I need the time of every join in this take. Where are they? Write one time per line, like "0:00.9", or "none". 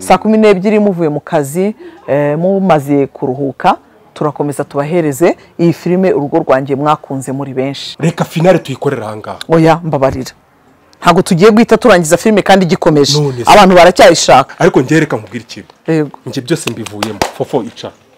0:07.9
0:14.5